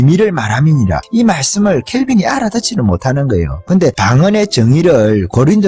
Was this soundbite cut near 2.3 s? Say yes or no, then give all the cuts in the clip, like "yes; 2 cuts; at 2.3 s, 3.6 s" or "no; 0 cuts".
no; 1 cut; at 3.8 s